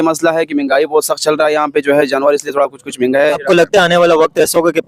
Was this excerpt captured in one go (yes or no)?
no